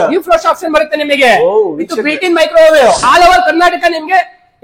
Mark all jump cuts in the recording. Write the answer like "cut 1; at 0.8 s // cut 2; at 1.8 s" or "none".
cut 1; at 3.0 s